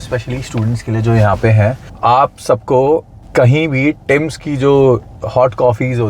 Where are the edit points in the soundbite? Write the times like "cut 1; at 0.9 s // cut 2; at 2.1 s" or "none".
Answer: cut 1; at 1.9 s // cut 2; at 3.2 s